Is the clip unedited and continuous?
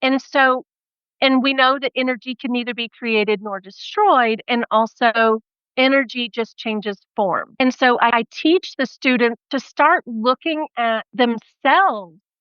no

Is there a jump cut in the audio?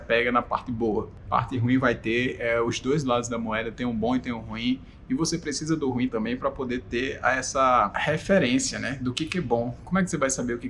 yes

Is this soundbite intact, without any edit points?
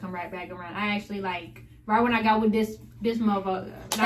yes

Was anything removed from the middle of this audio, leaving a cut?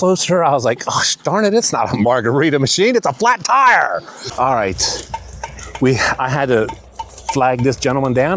yes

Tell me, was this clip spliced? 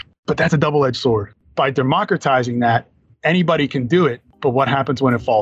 yes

